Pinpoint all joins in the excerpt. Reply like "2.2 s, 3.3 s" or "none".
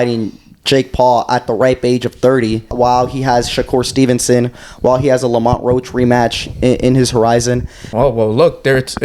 2.7 s, 7.9 s